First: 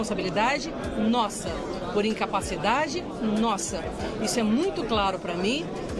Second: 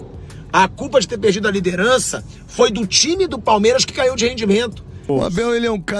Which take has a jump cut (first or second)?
second